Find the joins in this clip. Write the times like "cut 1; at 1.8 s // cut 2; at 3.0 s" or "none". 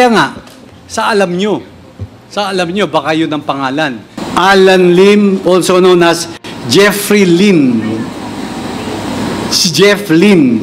cut 1; at 4.1 s